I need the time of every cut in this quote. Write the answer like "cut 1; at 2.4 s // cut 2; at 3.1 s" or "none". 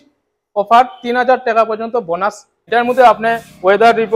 cut 1; at 2.5 s